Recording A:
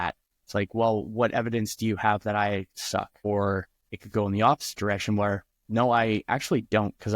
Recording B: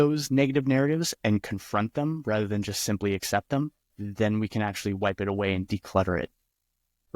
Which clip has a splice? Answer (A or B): A